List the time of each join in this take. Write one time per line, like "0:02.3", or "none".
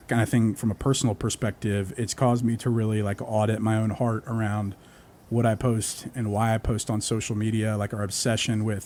none